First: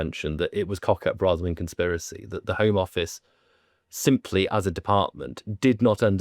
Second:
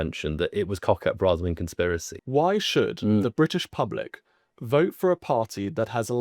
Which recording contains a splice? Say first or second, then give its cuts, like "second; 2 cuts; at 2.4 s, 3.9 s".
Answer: second; 1 cut; at 2.1 s